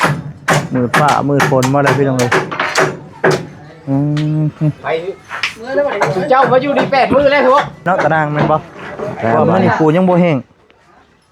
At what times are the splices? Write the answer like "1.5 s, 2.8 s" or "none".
7.9 s